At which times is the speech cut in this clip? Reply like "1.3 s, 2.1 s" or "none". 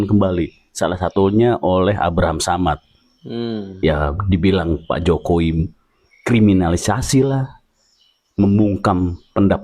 none